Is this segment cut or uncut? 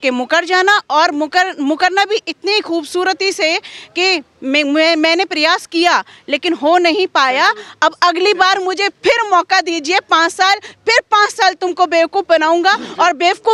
uncut